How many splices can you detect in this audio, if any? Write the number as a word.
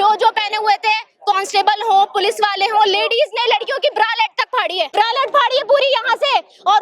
one